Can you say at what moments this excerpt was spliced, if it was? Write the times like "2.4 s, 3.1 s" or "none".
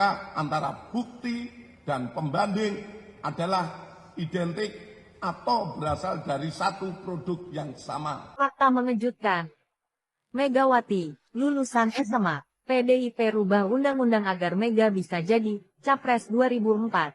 8.2 s